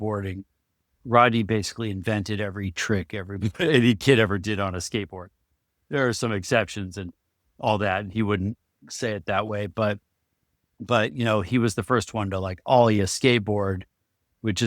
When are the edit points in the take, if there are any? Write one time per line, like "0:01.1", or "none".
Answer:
none